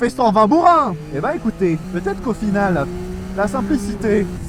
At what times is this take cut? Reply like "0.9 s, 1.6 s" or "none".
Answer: 1.9 s